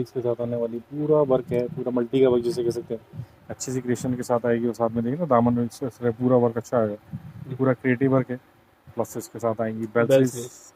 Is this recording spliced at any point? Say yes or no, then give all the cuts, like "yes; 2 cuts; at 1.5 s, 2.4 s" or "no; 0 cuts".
no; 0 cuts